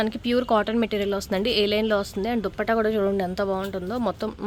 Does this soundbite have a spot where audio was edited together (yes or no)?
no